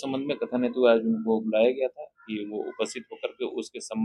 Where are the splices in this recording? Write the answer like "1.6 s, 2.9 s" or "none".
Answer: none